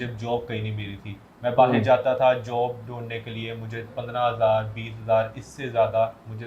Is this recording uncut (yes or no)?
yes